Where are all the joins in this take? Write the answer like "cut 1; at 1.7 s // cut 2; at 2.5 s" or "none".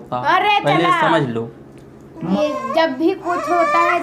cut 1; at 2.4 s